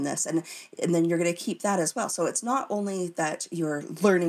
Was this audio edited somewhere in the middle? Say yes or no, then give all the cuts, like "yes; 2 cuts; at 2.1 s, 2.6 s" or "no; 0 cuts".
no; 0 cuts